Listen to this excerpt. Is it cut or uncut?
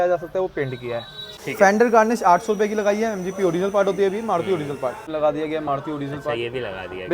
cut